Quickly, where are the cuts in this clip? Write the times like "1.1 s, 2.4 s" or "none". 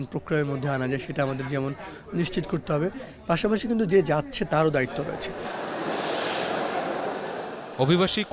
none